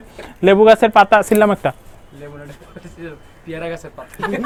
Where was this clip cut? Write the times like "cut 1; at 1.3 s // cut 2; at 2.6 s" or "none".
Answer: none

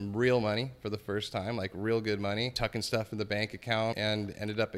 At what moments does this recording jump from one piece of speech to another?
cut 1; at 2.5 s // cut 2; at 4.0 s

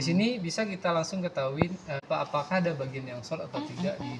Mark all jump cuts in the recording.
cut 1; at 2.0 s

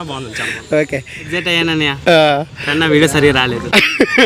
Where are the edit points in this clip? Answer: cut 1; at 1.2 s

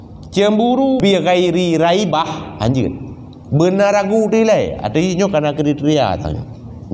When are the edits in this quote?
cut 1; at 1.0 s

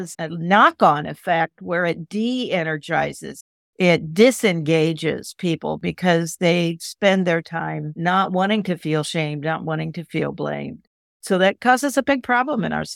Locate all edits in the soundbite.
none

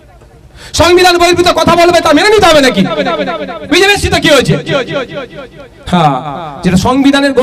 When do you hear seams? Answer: none

